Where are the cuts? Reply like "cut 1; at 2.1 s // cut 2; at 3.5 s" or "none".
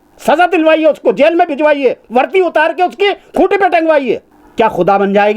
cut 1; at 4.4 s